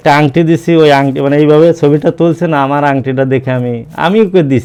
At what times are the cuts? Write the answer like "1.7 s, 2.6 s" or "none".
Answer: none